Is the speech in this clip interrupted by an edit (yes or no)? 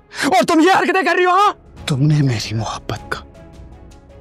yes